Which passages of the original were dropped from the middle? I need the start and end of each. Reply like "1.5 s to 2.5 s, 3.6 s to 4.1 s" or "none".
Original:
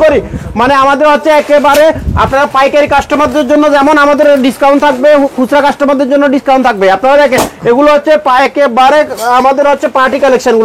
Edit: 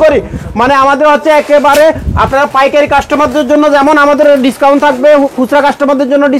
none